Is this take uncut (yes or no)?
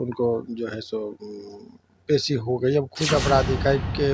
no